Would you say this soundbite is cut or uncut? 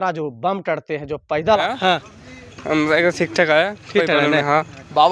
cut